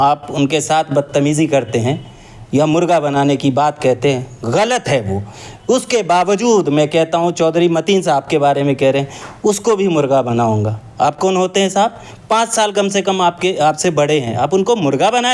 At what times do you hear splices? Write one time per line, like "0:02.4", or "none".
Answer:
none